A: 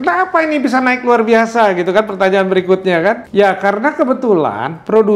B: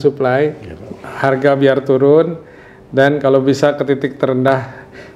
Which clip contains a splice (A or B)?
A